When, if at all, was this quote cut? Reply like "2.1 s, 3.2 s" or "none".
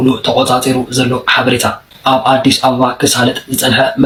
none